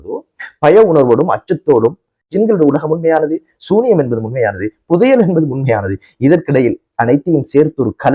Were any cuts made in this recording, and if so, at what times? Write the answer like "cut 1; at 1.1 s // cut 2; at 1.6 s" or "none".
cut 1; at 2.3 s